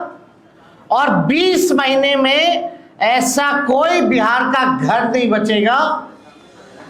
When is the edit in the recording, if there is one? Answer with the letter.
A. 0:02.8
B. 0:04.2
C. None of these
C